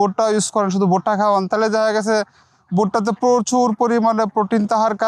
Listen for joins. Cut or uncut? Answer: uncut